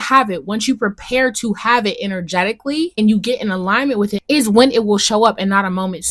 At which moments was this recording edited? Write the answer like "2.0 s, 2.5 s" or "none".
3.0 s, 4.2 s